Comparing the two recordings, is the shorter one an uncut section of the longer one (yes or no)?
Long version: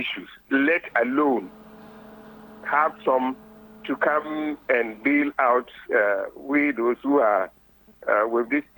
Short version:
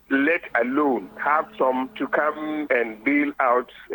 no